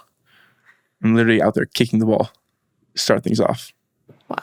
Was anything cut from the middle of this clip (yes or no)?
no